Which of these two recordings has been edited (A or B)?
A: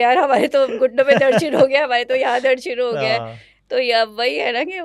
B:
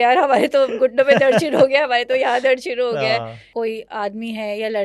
B